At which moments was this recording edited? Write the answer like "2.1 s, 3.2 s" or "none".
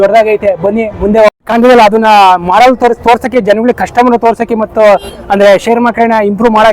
1.4 s